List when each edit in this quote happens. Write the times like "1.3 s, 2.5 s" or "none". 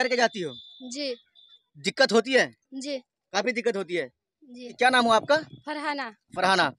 4.7 s